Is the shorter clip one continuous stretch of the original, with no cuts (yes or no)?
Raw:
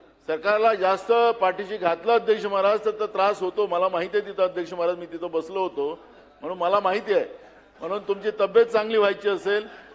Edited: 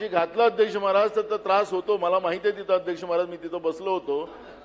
yes